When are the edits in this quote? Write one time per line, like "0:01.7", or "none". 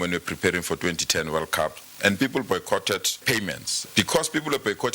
0:03.2